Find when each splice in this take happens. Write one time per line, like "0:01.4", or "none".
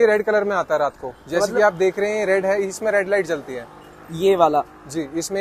none

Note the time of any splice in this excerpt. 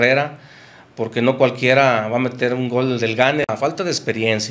0:03.5

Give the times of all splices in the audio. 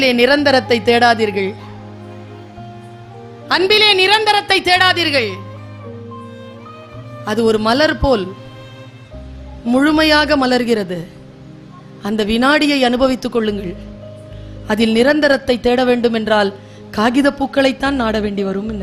none

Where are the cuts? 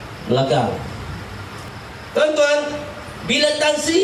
0:01.7

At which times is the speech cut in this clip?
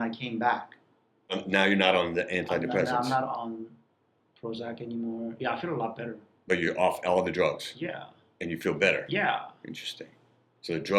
0:01.4

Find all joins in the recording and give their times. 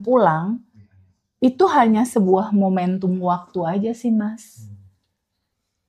none

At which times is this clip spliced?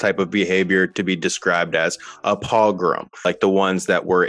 0:03.3

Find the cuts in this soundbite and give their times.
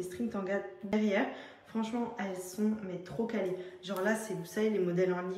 0:00.9

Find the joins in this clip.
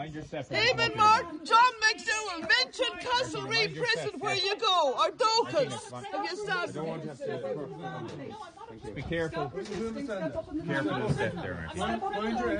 none

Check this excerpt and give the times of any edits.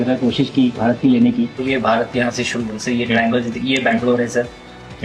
none

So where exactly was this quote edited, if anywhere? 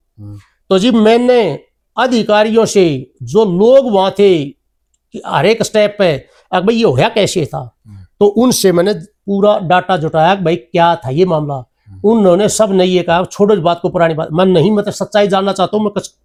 none

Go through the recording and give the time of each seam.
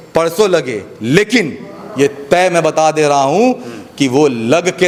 none

